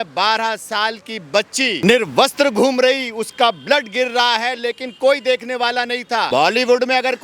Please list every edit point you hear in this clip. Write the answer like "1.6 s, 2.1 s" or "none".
1.8 s, 6.3 s